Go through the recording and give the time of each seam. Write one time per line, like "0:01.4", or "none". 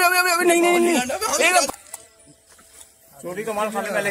0:01.7